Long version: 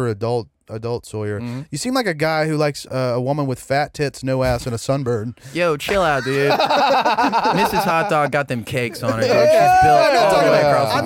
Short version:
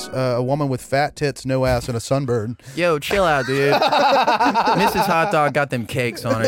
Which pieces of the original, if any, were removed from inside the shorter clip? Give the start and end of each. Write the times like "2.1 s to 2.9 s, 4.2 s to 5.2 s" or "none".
none